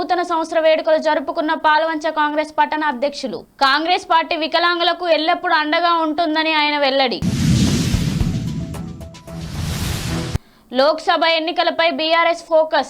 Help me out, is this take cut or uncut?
uncut